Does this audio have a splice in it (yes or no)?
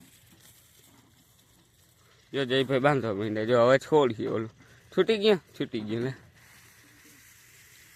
no